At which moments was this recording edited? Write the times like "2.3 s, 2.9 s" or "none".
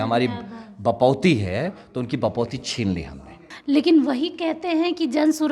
3.5 s